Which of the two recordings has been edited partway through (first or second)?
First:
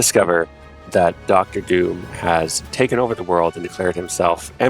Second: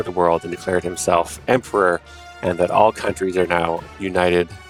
first